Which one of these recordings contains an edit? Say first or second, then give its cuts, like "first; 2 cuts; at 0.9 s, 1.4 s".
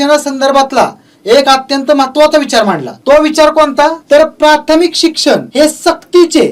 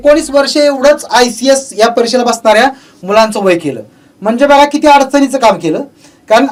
first; 3 cuts; at 2.9 s, 4.0 s, 5.5 s